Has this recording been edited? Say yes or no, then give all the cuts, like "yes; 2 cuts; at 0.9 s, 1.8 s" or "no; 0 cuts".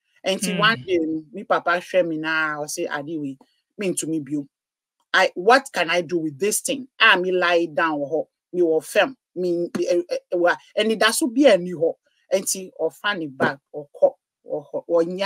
no; 0 cuts